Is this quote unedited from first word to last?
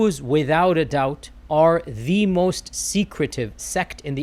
yes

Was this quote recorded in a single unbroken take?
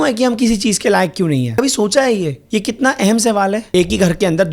no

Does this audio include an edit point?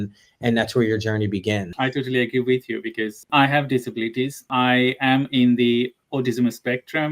yes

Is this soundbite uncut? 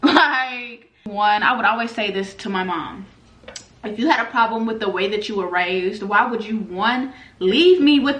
no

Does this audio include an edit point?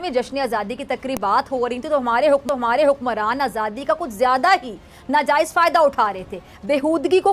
no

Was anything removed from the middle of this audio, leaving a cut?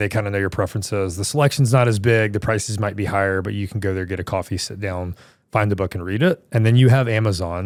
no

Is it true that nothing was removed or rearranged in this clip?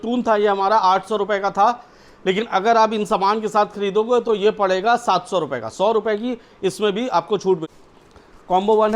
no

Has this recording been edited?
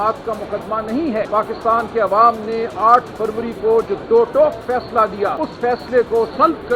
yes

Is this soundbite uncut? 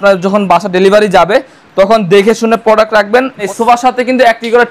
no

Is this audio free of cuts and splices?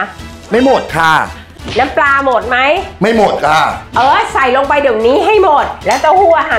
no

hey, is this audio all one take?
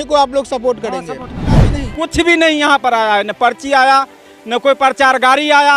no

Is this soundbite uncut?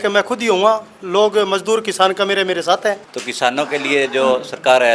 no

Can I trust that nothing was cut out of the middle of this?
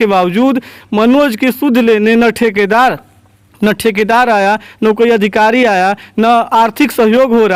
yes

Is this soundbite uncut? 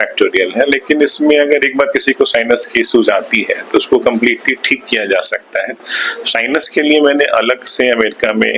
no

